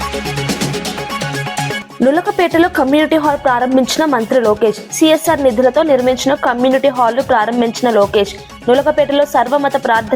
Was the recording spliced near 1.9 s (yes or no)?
yes